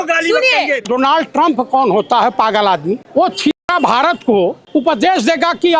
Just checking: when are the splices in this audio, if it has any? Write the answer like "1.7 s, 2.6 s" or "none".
0.9 s, 3.0 s, 4.6 s